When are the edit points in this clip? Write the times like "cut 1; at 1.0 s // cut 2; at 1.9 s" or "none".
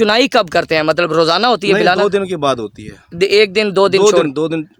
none